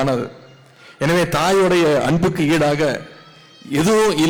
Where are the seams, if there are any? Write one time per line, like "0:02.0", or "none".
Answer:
none